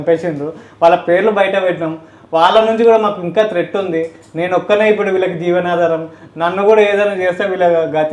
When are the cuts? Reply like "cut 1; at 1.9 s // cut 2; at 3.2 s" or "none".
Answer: none

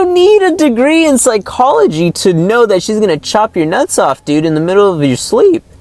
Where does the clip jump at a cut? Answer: none

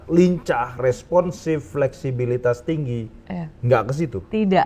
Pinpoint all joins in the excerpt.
none

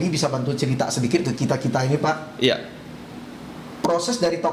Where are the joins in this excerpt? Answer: none

